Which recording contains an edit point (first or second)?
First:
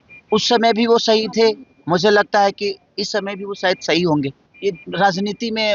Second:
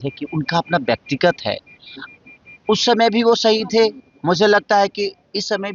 first